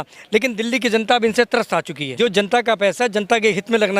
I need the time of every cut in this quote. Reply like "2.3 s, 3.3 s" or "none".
2.0 s